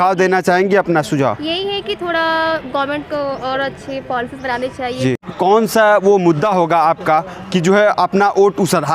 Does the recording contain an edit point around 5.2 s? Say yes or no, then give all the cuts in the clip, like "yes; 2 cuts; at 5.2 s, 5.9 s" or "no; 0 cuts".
yes; 1 cut; at 5.2 s